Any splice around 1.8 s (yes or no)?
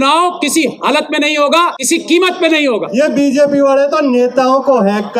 yes